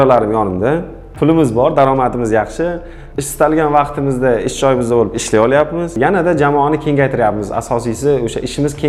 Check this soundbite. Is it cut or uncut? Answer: uncut